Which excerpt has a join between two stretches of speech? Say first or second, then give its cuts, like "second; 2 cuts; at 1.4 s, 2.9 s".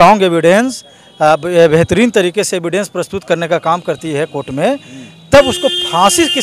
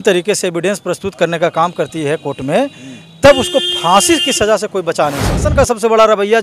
second; 1 cut; at 5.5 s